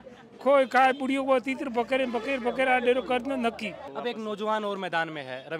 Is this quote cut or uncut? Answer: cut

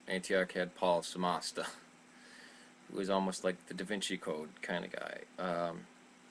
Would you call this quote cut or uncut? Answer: cut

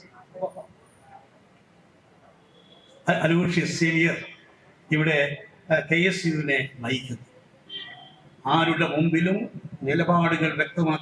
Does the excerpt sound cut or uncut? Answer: uncut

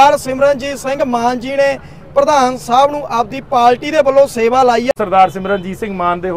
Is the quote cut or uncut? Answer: cut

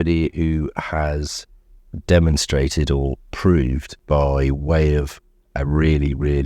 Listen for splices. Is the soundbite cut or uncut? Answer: cut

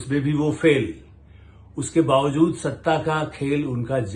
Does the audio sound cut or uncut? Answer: uncut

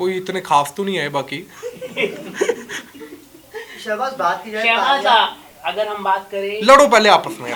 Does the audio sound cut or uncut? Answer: uncut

